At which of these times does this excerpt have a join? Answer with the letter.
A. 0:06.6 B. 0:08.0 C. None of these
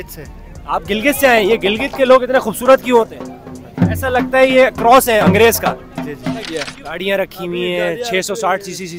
A